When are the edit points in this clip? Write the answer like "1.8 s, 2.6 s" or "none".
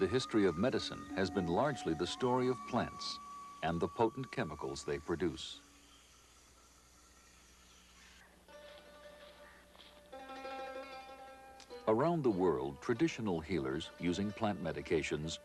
none